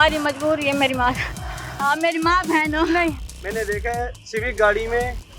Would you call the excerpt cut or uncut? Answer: cut